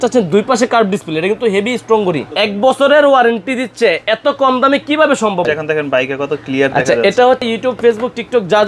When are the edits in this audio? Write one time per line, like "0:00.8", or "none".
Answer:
0:02.3
0:05.5
0:07.5